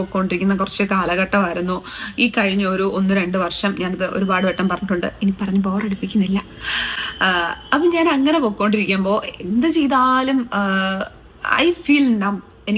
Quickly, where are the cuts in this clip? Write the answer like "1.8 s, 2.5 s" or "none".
none